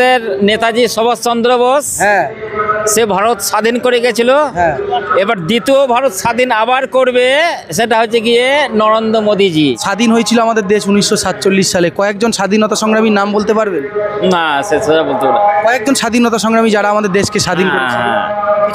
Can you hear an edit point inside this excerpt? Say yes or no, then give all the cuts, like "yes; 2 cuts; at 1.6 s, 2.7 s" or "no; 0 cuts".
yes; 1 cut; at 9.8 s